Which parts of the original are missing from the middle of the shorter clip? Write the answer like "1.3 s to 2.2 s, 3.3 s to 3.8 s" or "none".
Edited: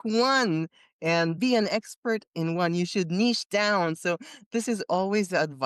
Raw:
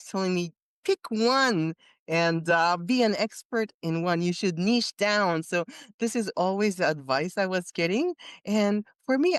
2.4 s to 2.8 s